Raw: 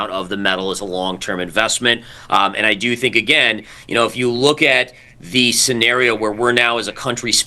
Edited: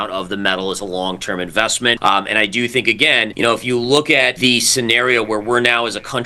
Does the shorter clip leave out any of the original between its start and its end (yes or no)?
yes